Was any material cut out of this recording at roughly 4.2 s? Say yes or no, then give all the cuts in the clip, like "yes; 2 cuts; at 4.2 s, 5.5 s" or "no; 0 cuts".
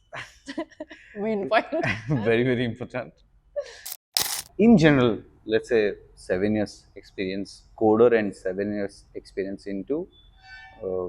yes; 1 cut; at 4.2 s